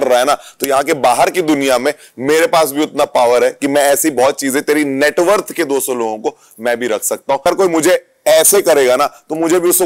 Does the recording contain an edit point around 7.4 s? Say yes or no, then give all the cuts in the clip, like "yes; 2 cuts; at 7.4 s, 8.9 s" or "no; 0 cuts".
yes; 1 cut; at 7.4 s